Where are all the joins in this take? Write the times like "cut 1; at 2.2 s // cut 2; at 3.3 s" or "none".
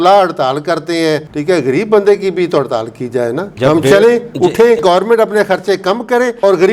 cut 1; at 4.8 s